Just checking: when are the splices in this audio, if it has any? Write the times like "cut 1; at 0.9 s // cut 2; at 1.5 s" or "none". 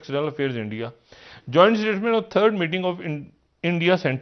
none